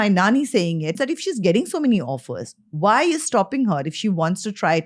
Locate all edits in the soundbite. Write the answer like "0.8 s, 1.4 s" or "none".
1.0 s